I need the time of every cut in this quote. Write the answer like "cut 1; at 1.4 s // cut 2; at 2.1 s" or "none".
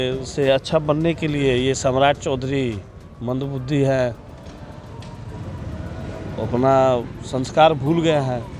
none